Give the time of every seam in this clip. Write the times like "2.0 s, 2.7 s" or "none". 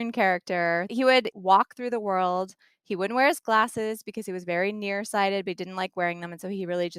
0.9 s

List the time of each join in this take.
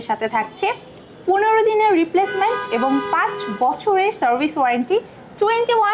none

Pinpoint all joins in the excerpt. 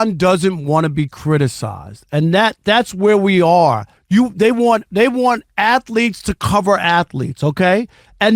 3.9 s

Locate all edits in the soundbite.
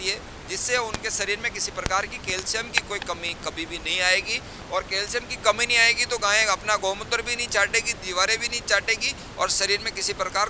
none

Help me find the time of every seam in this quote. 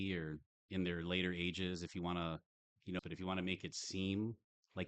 3.0 s

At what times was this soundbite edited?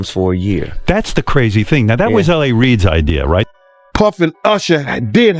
3.5 s

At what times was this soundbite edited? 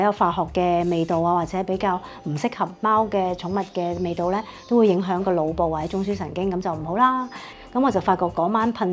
7.4 s

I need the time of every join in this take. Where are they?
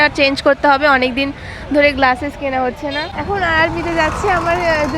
3.1 s

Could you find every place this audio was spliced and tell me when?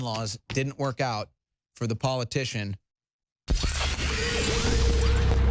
3.3 s

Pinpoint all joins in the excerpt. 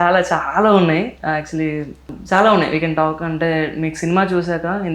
2.1 s

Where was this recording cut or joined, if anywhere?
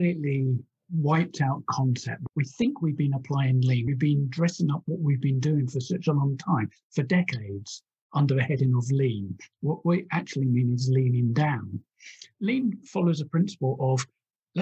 2.1 s, 3.9 s, 12.2 s

